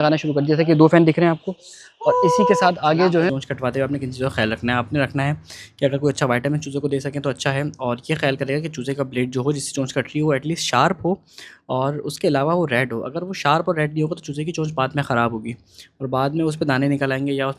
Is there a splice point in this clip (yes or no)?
yes